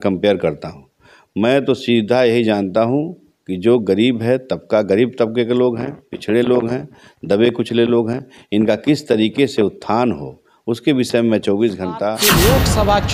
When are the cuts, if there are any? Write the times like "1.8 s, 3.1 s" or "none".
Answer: 12.2 s